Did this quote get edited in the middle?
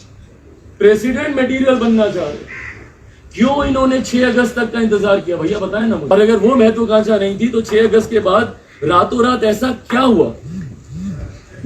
yes; 1 cut; at 6.1 s

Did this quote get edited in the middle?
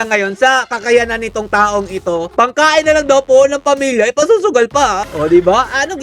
yes; 2 cuts; at 2.3 s, 5.0 s

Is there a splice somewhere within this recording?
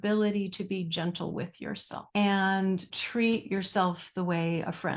yes; 2 cuts; at 1.9 s, 3.0 s

